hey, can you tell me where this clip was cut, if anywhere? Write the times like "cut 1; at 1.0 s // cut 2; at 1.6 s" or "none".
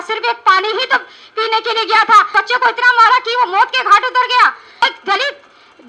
cut 1; at 2.3 s // cut 2; at 4.8 s